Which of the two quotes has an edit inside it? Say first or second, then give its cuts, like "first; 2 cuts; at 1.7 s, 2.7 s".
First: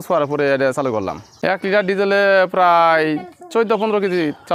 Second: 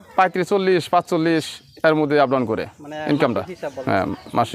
first; 1 cut; at 1.3 s